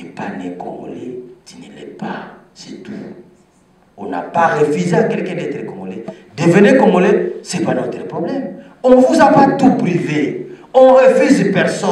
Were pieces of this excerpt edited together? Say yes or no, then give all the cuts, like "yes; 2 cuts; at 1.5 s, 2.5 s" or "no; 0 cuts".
no; 0 cuts